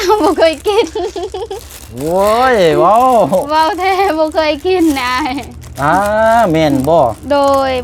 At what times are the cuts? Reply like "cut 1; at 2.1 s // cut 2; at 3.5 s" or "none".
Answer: none